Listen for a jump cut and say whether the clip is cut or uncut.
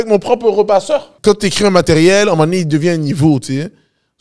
cut